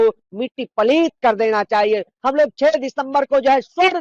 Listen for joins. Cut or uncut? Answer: cut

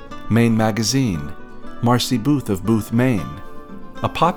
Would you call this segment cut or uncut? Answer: uncut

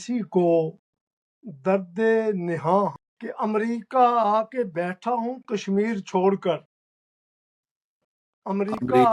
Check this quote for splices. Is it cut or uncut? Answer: cut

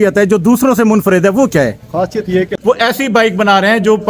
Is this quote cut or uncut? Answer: cut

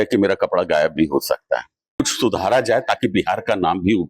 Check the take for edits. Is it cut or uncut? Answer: cut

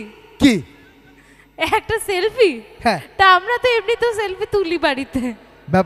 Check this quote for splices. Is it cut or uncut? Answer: uncut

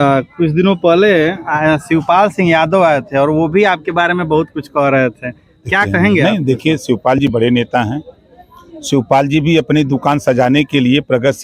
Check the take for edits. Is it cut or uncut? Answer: uncut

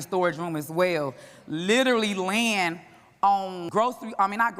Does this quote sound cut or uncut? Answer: cut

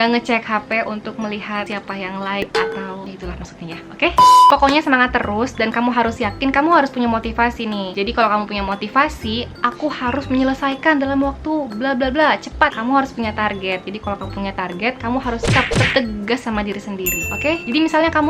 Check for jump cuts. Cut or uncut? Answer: uncut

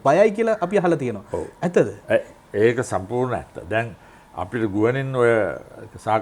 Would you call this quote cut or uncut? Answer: uncut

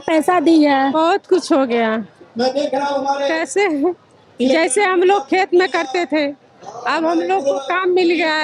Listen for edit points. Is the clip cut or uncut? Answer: cut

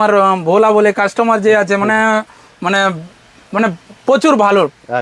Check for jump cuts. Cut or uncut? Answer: uncut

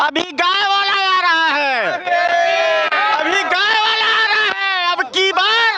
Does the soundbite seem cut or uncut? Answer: uncut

